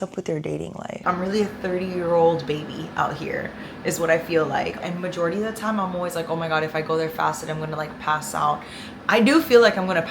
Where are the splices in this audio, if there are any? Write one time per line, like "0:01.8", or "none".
0:01.0
0:04.8